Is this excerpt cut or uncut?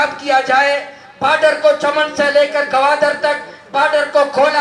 uncut